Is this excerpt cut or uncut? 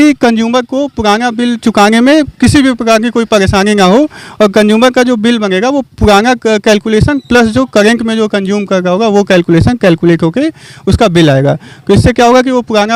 uncut